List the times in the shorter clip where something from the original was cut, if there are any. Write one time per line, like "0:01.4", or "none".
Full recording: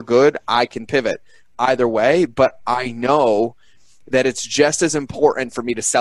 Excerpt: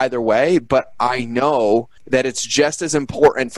0:02.0

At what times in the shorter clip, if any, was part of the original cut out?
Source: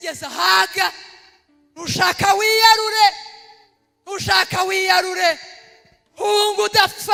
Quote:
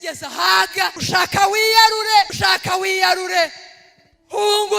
0:01.0
0:02.3

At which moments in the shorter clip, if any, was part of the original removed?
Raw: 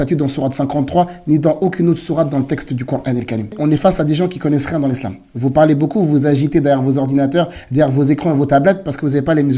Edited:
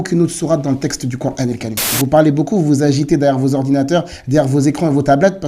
0:01.8

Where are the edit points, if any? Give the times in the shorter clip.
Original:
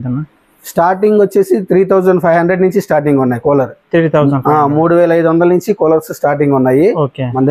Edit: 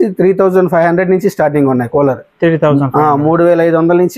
none

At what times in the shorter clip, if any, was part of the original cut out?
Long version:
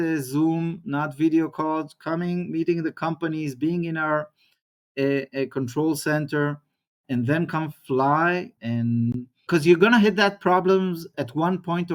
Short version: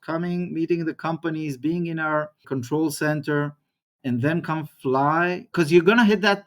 0:02.5
0:05.4

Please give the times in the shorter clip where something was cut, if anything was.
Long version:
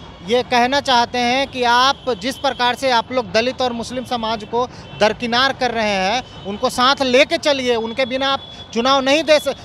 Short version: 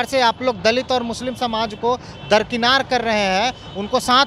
none

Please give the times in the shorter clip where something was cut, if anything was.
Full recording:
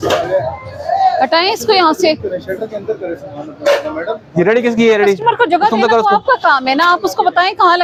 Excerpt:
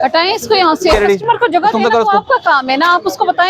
0:00.9

